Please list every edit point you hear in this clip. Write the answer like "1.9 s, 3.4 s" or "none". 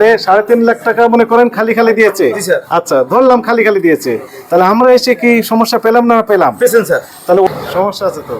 7.5 s

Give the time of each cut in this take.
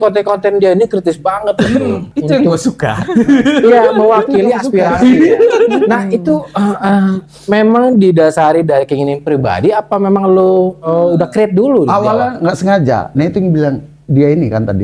2.1 s

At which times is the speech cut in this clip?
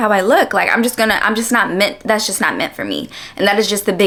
none

